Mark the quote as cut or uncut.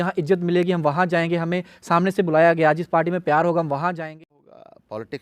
cut